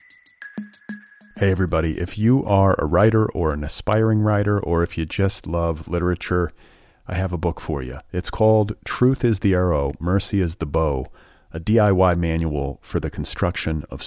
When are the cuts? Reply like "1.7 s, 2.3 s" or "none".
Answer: 0.9 s